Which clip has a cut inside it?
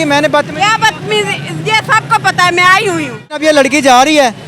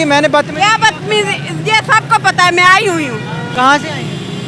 first; 1 cut; at 3.4 s

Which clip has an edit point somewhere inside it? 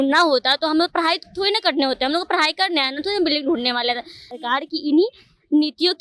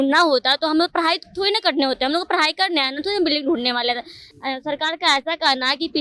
first; 1 cut; at 4.3 s

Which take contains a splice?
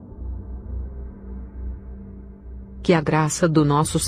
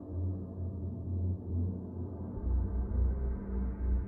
first; 1 cut; at 2.8 s

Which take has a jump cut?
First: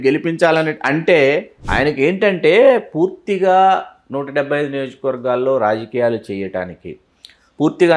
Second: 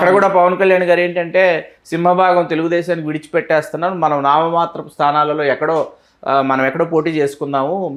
first; 1 cut; at 1.6 s

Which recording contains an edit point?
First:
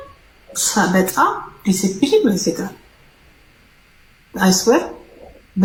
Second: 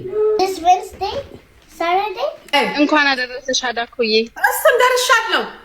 second; 1 cut; at 2.4 s

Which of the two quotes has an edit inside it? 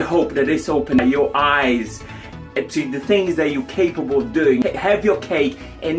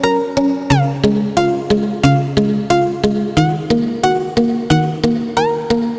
first; 2 cuts; at 1.0 s, 4.6 s

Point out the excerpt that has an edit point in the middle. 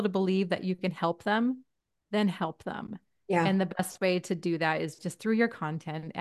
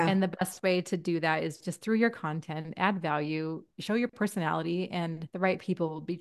second; 2 cuts; at 3.8 s, 5.2 s

